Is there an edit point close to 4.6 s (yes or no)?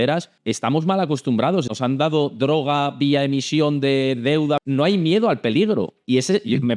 yes